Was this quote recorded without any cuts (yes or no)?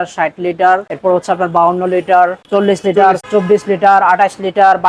no